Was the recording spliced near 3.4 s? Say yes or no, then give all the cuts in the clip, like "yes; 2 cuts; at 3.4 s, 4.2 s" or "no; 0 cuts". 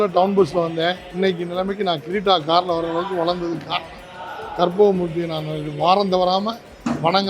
no; 1 cut; at 1.0 s